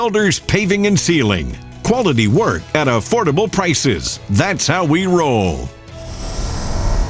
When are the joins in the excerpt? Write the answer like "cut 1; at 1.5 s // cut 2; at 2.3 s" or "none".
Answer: cut 1; at 5.8 s